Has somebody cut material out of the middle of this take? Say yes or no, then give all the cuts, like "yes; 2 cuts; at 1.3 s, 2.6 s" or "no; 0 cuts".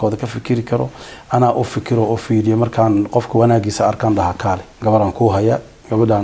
yes; 1 cut; at 4.7 s